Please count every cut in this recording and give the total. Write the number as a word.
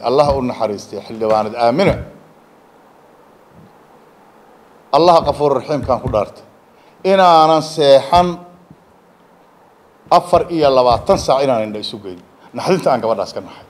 zero